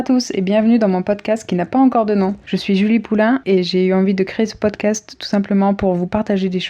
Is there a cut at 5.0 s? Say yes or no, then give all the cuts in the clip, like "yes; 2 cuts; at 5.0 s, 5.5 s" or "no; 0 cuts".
no; 2 cuts; at 2.5 s, 3.6 s